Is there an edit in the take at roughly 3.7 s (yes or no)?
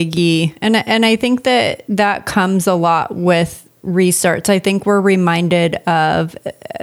no